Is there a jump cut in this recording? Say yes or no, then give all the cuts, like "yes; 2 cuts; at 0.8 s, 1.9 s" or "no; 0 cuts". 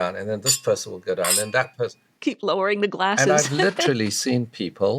yes; 1 cut; at 2.0 s